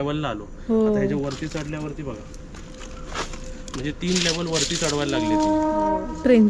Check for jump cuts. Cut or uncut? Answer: uncut